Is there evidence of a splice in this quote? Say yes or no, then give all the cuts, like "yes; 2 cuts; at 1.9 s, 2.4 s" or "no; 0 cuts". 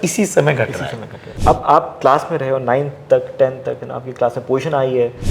yes; 1 cut; at 1.3 s